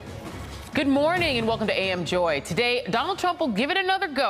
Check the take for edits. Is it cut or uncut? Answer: cut